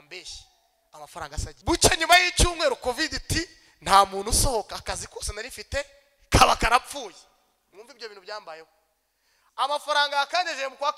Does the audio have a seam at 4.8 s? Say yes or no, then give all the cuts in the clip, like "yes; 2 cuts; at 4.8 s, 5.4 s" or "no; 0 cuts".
no; 1 cut; at 1.6 s